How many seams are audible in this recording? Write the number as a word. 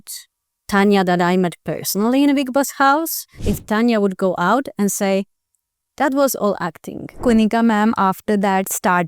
two